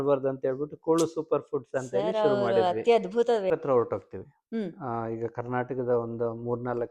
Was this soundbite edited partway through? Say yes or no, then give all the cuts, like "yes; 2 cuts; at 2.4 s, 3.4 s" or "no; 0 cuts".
yes; 1 cut; at 3.6 s